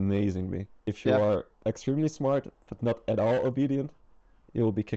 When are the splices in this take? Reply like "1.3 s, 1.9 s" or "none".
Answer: 0.9 s, 1.5 s